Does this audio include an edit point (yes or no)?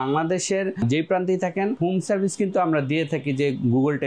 yes